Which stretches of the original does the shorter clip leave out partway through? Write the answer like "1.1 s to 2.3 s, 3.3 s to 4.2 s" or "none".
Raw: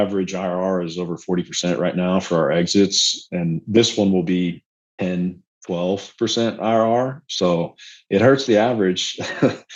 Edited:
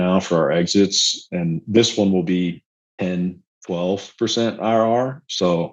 none